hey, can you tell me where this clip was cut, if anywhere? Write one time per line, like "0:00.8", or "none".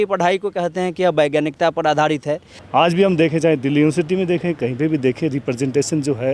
0:02.5